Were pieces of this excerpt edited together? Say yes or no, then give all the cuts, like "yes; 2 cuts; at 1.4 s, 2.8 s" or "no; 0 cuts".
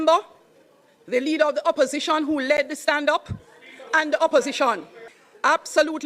yes; 1 cut; at 4.9 s